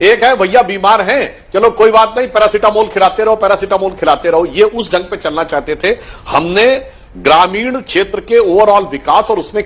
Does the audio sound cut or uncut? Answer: uncut